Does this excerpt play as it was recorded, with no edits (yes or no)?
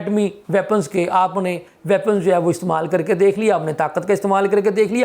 yes